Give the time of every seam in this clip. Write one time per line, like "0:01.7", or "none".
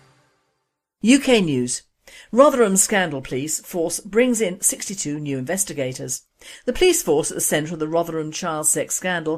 0:06.6